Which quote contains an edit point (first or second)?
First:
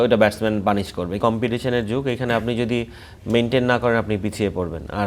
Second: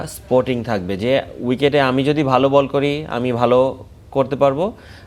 first